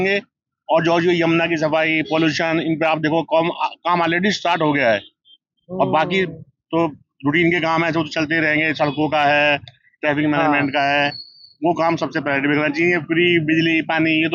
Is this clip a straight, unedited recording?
yes; 0 cuts

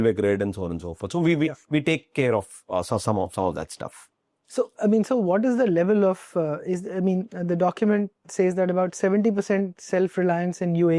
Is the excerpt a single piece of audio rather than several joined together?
yes; 0 cuts

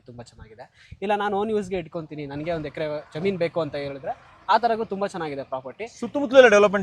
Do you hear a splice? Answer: no; 0 cuts

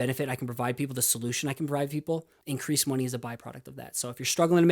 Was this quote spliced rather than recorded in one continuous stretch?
yes; 1 cut; at 2.3 s

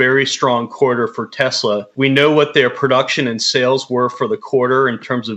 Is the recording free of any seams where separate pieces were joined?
yes; 0 cuts

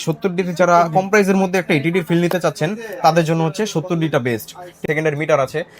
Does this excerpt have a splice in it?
yes; 1 cut; at 4.8 s

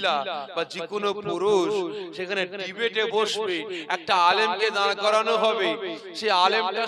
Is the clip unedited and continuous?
yes; 0 cuts

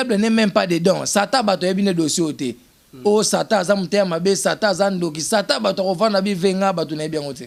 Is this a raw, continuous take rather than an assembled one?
yes; 0 cuts

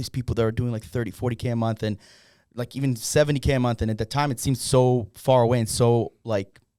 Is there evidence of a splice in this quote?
no; 0 cuts

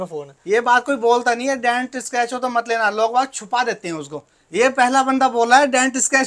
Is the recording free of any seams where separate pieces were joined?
yes; 0 cuts

